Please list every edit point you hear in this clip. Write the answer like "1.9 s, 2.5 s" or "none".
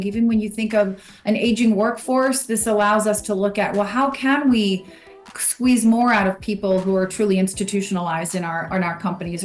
none